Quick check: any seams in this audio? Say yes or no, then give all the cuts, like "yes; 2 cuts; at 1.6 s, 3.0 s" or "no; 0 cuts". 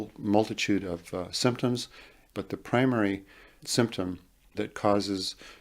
yes; 2 cuts; at 2.3 s, 4.6 s